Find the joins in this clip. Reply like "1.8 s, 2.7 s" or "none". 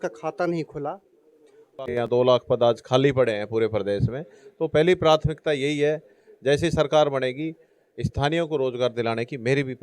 2.1 s